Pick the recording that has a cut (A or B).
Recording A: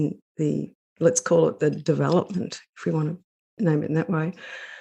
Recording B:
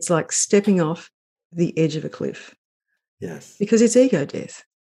A